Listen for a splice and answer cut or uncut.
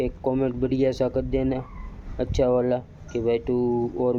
uncut